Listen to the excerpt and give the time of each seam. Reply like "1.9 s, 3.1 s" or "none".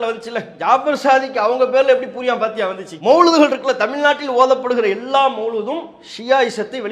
none